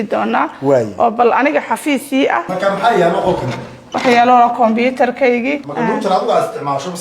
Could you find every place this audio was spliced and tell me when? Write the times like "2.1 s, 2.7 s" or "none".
5.6 s